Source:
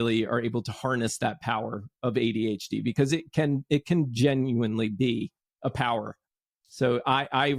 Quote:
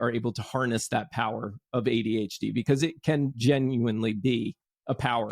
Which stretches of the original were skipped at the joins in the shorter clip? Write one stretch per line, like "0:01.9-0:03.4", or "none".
0:03.6-0:04.1